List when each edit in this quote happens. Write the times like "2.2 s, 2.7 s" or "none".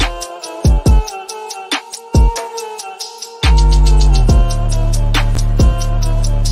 5.4 s